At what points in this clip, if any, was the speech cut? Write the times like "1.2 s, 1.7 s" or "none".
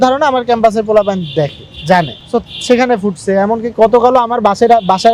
none